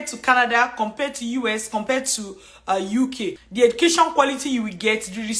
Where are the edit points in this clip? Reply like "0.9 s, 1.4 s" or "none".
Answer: 3.4 s

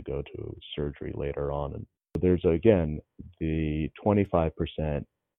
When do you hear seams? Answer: 2.2 s

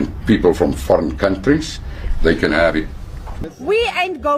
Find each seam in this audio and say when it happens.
3.3 s

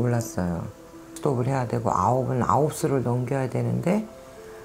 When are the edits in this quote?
1.1 s

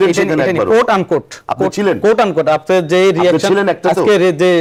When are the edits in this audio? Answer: none

